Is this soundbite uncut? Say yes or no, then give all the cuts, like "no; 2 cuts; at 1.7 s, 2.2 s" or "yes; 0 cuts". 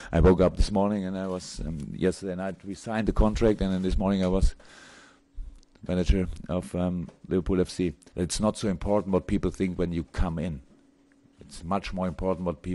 yes; 0 cuts